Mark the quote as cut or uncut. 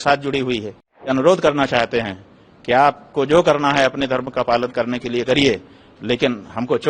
cut